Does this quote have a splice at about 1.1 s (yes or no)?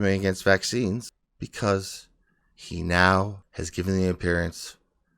yes